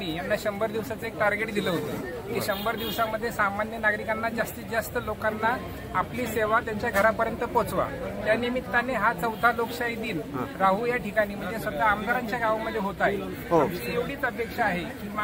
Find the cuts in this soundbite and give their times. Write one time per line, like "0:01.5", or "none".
none

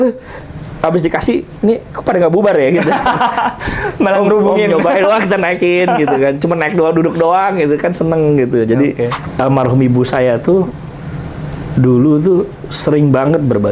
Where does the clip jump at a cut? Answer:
0:09.2

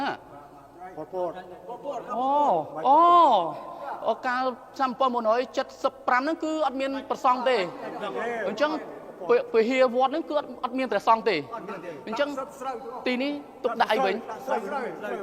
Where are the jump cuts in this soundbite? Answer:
none

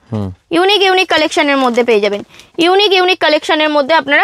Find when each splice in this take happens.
none

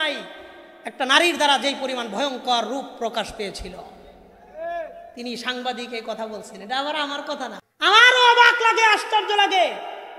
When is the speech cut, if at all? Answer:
0:07.6

